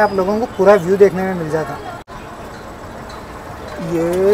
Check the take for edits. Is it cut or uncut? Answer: uncut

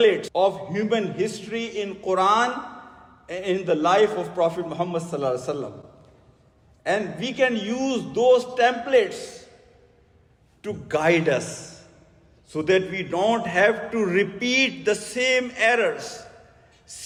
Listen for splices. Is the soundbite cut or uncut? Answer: uncut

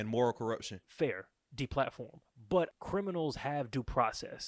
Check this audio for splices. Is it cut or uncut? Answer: cut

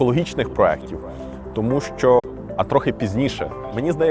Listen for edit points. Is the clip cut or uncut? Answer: cut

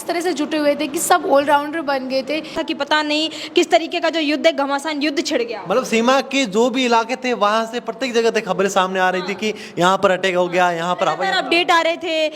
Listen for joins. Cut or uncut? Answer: cut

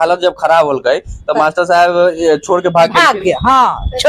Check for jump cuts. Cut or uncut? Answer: uncut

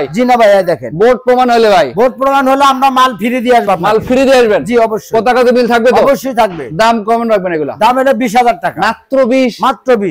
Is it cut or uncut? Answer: uncut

